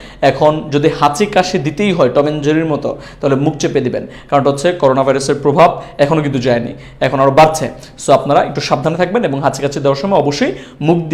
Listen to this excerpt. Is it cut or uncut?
uncut